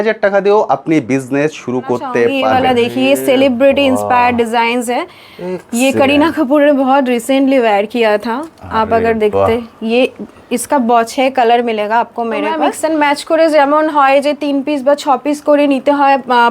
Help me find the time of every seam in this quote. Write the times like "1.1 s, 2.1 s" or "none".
2.4 s, 12.7 s